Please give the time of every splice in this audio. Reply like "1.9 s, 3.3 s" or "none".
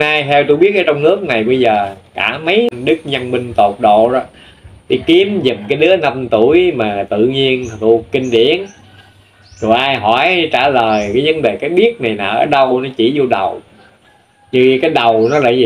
2.7 s